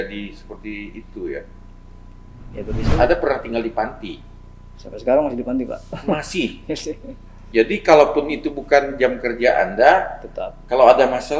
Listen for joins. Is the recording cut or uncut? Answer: cut